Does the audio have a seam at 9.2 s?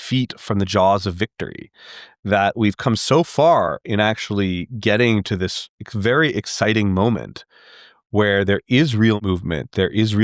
yes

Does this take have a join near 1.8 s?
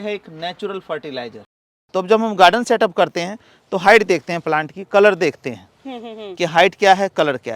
yes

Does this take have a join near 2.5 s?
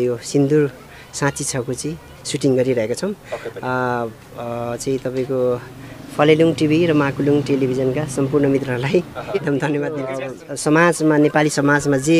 no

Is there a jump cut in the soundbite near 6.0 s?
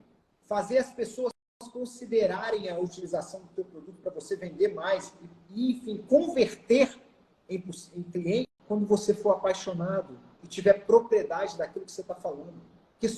no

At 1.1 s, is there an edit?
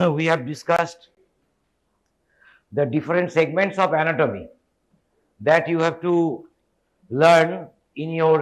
yes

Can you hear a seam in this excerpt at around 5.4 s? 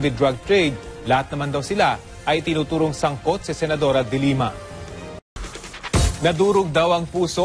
no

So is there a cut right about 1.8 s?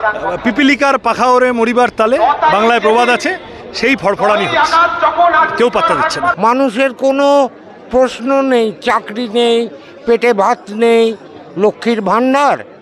no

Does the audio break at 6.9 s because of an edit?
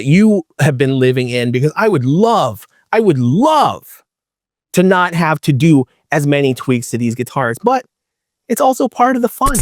no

